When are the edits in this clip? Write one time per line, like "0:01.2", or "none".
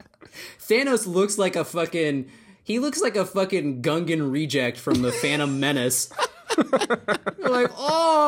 none

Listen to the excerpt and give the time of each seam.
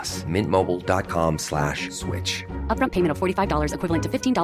none

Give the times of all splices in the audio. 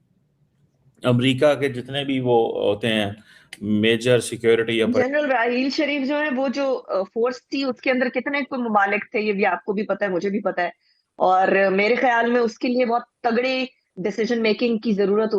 0:04.9

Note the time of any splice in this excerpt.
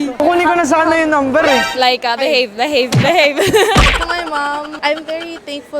0:03.9

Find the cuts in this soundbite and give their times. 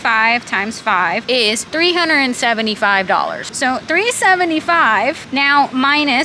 0:01.5
0:03.5
0:05.2

